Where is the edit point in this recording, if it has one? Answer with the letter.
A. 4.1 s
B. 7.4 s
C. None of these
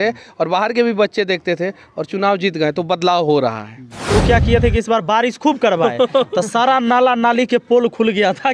A